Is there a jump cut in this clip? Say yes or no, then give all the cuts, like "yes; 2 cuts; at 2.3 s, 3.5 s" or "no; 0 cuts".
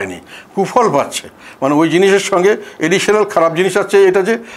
no; 0 cuts